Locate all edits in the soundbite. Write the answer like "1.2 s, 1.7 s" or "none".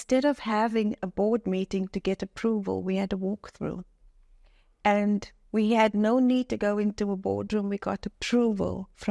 none